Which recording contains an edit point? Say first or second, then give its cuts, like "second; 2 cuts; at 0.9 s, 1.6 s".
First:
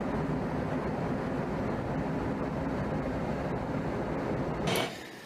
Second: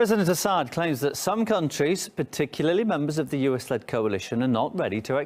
first; 1 cut; at 0.9 s